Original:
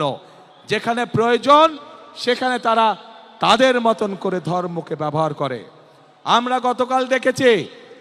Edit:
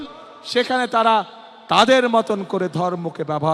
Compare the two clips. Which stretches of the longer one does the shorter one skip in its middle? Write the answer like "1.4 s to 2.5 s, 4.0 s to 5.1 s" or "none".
none